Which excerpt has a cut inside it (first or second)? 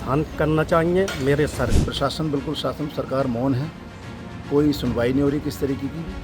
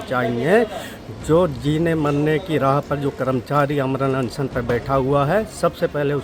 first